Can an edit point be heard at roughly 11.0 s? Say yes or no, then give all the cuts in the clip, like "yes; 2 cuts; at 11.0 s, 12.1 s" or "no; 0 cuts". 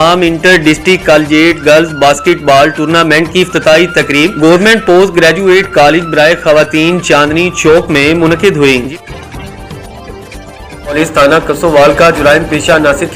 yes; 2 cuts; at 8.9 s, 11.0 s